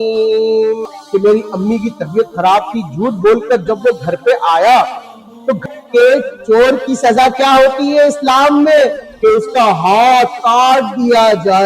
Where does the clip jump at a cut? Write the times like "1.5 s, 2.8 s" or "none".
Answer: 0.9 s, 5.6 s